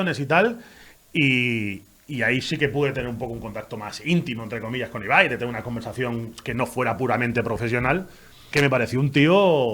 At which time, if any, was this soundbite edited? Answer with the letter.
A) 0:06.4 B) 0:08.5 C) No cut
B